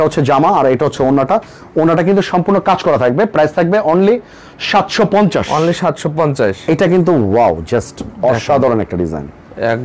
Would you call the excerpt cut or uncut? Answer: uncut